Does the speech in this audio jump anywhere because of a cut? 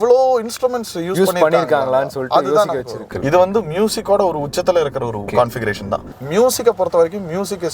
yes; 2 cuts; at 3.1 s, 6.1 s

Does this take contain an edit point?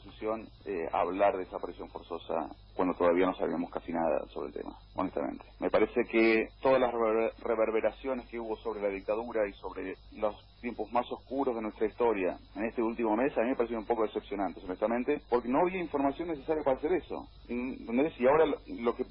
yes; 1 cut; at 13.6 s

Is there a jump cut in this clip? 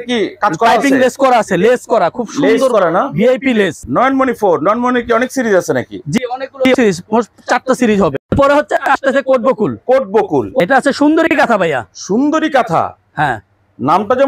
yes; 3 cuts; at 3.8 s, 8.1 s, 10.6 s

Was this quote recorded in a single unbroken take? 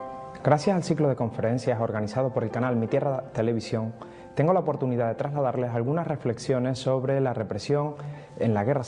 yes; 0 cuts

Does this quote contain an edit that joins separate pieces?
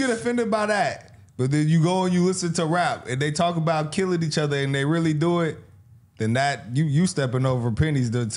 no; 0 cuts

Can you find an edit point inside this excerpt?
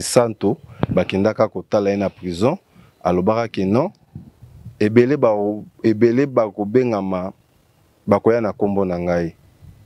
no; 0 cuts

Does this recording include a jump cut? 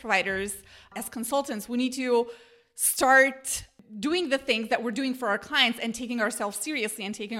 yes; 1 cut; at 0.9 s

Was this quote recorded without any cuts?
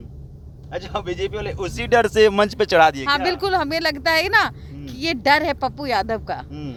yes; 0 cuts

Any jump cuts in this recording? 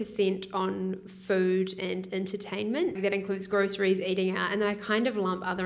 yes; 1 cut; at 3.0 s

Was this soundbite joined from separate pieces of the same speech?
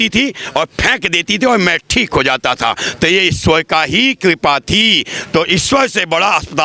no; 0 cuts

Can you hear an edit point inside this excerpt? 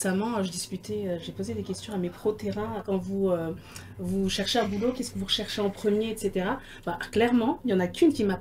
yes; 1 cut; at 2.8 s

